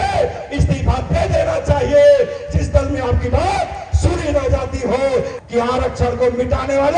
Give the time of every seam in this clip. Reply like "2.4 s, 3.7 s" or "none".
5.4 s